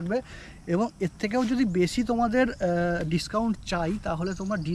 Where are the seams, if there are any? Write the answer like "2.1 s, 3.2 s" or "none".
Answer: none

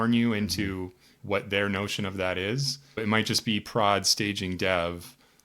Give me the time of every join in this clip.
1.1 s, 3.0 s

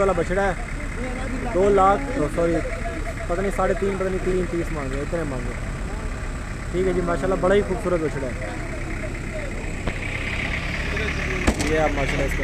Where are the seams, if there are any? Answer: none

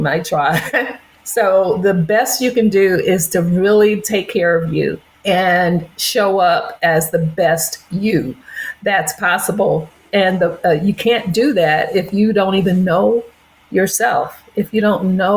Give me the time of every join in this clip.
1.1 s, 5.1 s

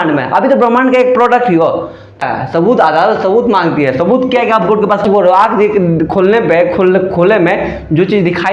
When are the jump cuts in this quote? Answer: 2.2 s, 5.0 s

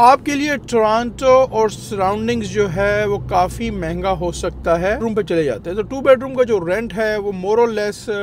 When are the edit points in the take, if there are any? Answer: 5.0 s

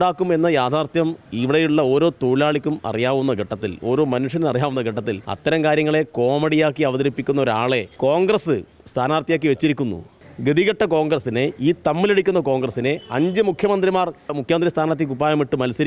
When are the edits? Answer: 1.2 s, 5.3 s, 7.9 s, 10.2 s, 14.4 s

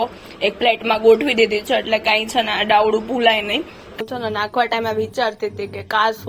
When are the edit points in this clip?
3.9 s

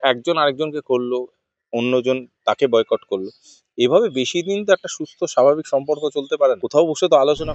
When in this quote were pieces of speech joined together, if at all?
6.6 s

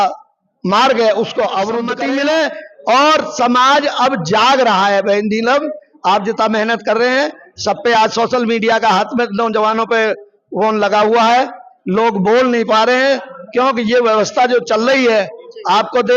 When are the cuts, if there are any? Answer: 1.9 s

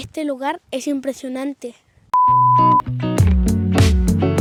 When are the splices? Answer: none

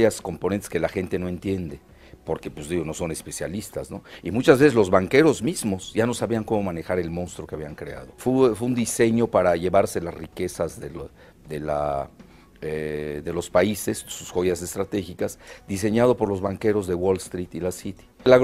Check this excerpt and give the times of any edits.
7.7 s

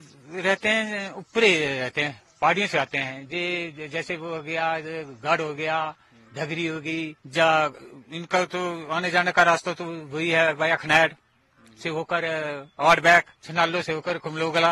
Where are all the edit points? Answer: 7.2 s, 13.4 s

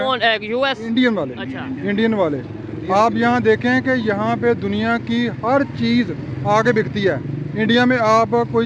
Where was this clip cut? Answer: none

